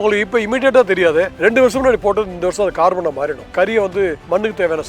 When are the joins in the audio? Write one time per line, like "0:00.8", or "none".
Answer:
0:01.3
0:03.6